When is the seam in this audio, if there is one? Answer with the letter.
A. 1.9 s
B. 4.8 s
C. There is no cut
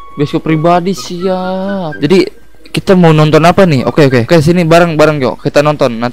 A